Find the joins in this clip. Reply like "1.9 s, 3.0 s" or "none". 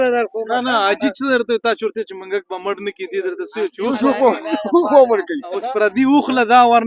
5.6 s